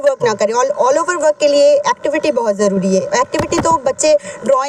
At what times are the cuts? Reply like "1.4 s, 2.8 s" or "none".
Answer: none